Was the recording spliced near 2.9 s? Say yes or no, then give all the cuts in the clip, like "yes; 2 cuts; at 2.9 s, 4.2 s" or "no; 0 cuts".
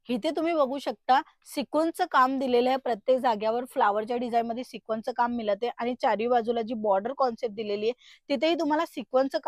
no; 0 cuts